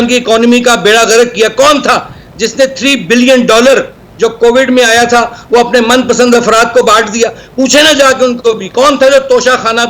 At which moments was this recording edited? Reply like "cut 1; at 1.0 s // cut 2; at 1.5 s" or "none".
none